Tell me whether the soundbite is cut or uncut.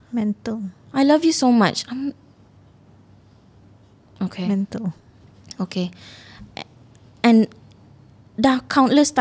uncut